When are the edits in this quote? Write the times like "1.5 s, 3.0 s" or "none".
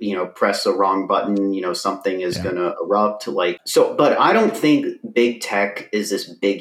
3.6 s

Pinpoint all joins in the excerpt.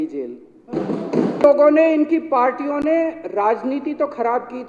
1.4 s

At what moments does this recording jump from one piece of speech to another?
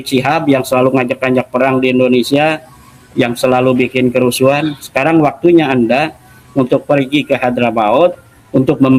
none

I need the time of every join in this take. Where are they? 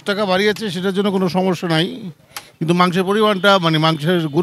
none

